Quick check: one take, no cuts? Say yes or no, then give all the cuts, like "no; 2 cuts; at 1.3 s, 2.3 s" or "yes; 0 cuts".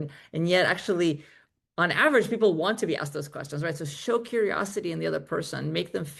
yes; 0 cuts